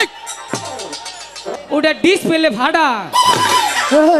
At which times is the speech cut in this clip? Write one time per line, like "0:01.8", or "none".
0:01.5